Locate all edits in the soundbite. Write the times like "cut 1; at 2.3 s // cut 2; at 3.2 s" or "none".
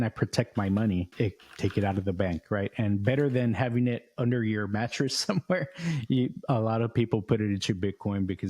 cut 1; at 1.1 s